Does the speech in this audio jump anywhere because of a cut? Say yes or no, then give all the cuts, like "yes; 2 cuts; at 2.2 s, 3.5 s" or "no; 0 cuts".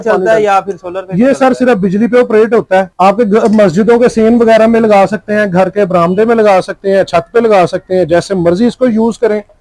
no; 0 cuts